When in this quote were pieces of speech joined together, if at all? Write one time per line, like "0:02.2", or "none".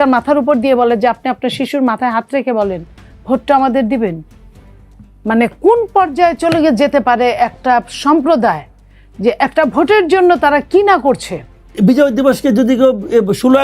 0:11.6